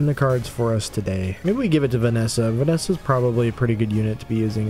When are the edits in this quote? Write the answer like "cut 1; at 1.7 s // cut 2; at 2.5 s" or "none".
cut 1; at 1.3 s